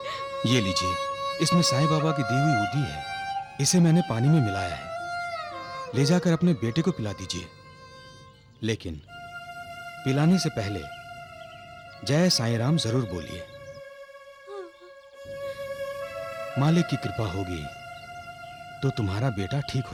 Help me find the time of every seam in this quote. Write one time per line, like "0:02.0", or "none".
none